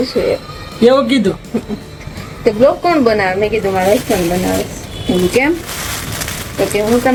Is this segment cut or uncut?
uncut